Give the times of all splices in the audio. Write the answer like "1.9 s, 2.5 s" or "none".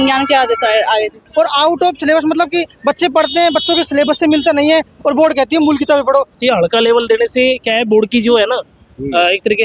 1.3 s, 6.3 s

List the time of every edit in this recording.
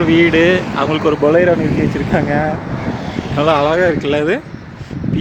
none

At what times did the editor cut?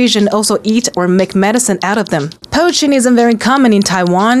2.4 s

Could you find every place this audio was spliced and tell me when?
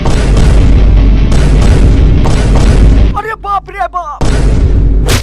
3.1 s

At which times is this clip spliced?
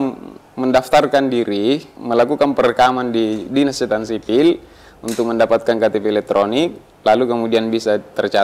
1.9 s

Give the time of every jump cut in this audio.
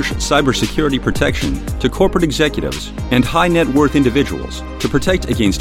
none

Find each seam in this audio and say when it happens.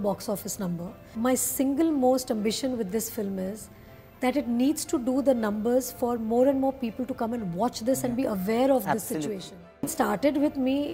1.0 s, 9.9 s

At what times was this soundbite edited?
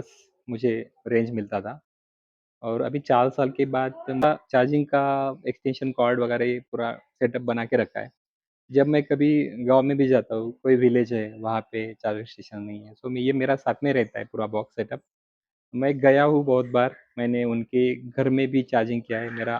4.2 s

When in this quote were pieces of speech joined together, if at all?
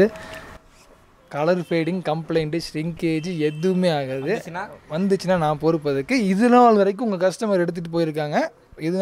none

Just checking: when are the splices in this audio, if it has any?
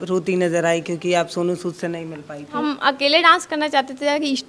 2.6 s

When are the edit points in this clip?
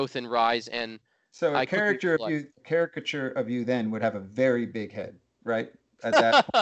none

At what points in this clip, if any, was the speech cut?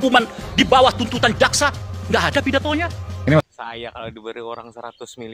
3.5 s

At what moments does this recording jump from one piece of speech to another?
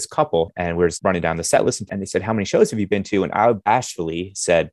0.9 s, 1.9 s

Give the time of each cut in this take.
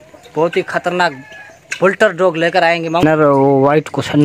3.0 s

